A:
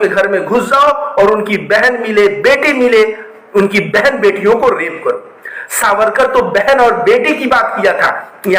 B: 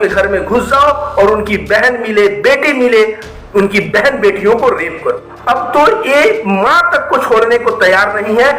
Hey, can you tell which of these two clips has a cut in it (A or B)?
B